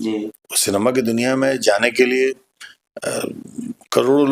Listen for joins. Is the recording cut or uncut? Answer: uncut